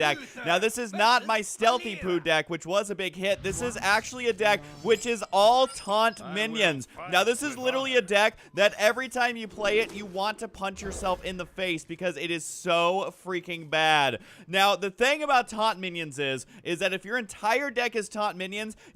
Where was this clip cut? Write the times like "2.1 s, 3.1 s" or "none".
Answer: 15.2 s